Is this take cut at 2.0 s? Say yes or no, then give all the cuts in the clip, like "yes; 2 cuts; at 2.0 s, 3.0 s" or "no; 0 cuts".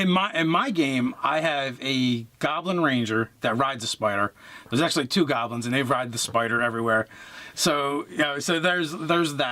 yes; 1 cut; at 2.0 s